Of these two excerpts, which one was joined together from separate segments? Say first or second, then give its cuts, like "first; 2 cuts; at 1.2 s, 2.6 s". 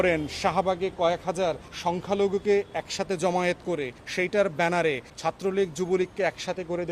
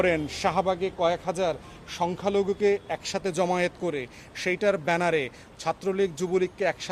first; 3 cuts; at 1.7 s, 4.0 s, 5.1 s